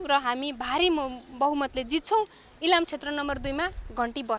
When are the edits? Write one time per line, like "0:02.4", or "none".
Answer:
none